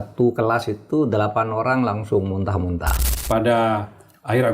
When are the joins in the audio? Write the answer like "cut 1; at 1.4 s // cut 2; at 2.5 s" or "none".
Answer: cut 1; at 3.1 s